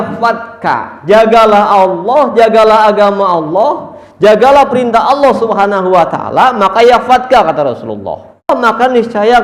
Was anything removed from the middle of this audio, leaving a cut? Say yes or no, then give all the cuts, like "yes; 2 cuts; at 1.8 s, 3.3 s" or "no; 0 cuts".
yes; 1 cut; at 8.5 s